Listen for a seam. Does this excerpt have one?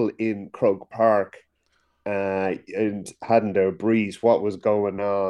no; 0 cuts

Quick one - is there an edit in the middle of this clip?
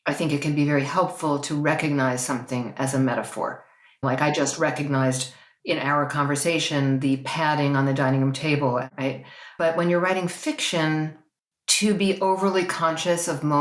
yes; 2 cuts; at 4.0 s, 8.8 s

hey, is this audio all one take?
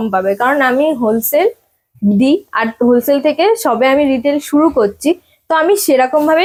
yes; 0 cuts

